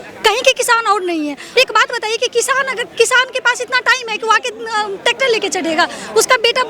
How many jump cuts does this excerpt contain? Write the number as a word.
one